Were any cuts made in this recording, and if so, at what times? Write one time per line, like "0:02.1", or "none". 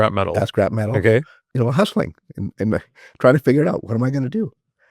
0:01.4